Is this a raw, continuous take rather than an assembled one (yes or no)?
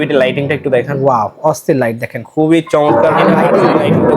no